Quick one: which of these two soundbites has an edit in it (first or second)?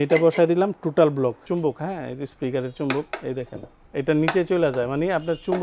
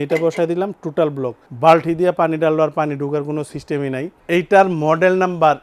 first